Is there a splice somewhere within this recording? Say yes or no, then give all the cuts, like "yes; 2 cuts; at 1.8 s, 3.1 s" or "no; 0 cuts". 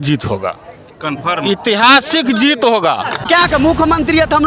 yes; 1 cut; at 3.2 s